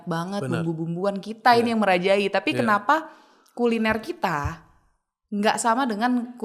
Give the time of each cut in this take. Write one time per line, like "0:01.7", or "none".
none